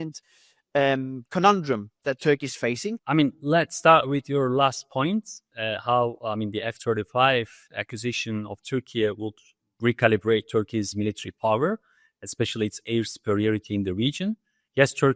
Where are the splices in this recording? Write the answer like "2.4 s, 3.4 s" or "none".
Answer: 3.0 s